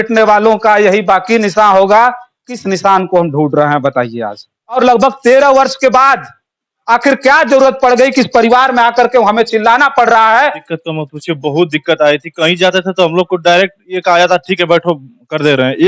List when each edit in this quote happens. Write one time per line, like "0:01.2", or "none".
0:04.8
0:10.7